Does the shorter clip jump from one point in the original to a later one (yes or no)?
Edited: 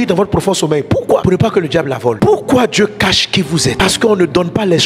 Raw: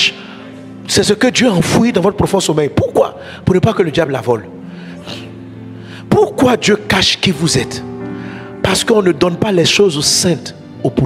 yes